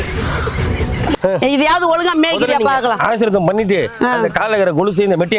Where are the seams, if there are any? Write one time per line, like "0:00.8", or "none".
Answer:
0:01.2